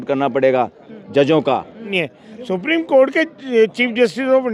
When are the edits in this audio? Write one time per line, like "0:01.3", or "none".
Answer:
0:01.9